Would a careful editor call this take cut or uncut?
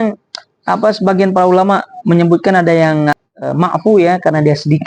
cut